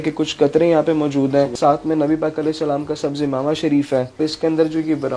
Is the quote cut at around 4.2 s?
yes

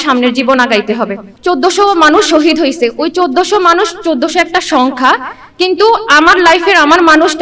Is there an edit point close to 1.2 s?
yes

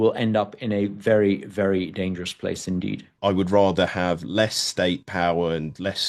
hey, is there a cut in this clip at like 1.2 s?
no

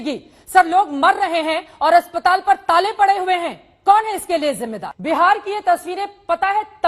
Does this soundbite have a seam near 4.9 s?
yes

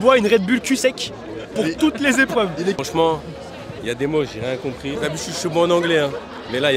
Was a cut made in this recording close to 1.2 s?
no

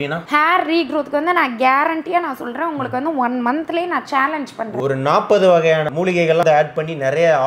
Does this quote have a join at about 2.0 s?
no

